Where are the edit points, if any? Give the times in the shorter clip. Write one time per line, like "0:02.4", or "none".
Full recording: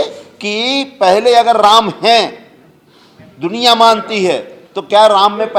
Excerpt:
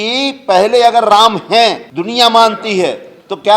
0:01.9